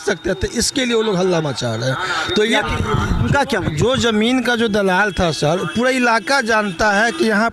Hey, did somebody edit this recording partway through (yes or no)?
yes